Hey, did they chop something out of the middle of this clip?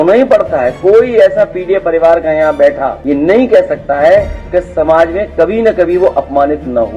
yes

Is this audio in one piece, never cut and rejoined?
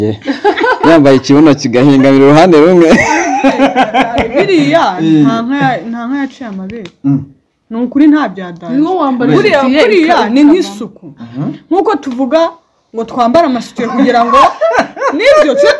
yes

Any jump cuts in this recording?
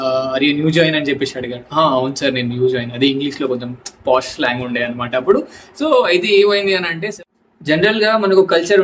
yes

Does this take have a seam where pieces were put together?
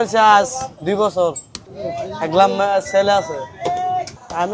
no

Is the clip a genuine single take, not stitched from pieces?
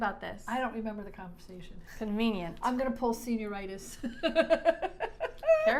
yes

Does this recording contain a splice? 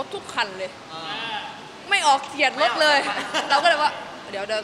no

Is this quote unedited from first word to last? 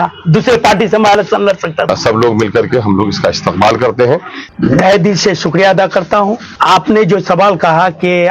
no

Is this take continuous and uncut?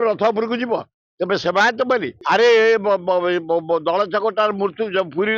no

